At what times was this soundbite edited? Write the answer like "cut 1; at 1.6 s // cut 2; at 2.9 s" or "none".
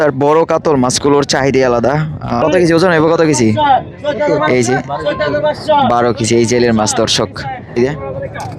cut 1; at 2.4 s // cut 2; at 7.8 s